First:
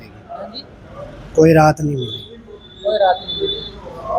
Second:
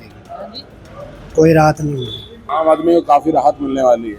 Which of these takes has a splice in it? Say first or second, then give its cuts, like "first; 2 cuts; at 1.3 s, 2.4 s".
second; 1 cut; at 2.5 s